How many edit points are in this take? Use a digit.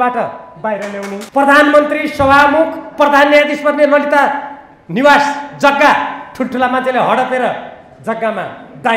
1